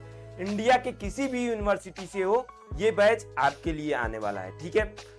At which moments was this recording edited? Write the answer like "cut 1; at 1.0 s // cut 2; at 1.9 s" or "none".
none